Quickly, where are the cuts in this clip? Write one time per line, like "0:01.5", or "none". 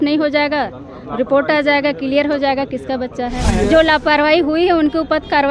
0:03.5